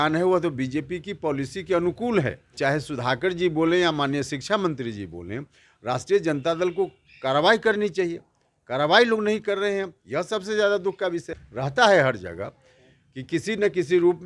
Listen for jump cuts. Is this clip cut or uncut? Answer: cut